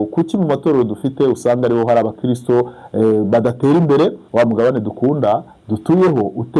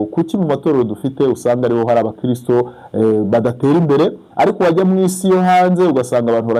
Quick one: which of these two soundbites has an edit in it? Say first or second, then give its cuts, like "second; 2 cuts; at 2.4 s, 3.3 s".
first; 1 cut; at 4.2 s